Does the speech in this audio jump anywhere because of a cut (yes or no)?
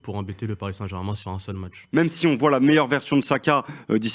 yes